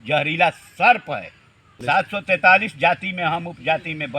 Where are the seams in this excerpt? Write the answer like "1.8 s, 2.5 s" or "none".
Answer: 1.7 s